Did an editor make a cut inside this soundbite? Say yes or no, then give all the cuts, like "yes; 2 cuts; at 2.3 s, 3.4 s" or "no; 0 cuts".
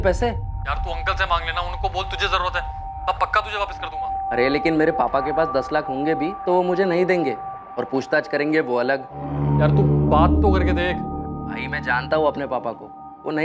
no; 0 cuts